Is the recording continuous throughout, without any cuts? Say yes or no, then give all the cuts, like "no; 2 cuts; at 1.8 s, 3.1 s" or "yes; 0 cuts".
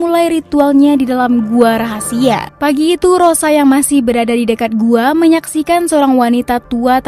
no; 1 cut; at 2.5 s